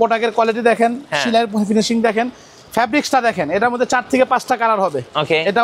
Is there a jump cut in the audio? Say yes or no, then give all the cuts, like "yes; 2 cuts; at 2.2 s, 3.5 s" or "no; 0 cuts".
no; 0 cuts